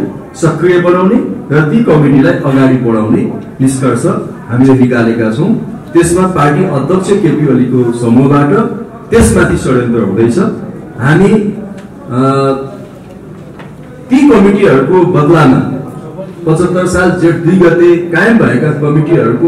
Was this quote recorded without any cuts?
yes; 0 cuts

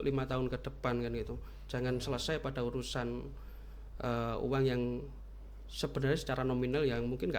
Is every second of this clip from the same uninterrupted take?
yes; 0 cuts

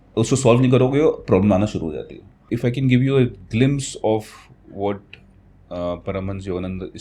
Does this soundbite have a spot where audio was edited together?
yes; 1 cut; at 2.3 s

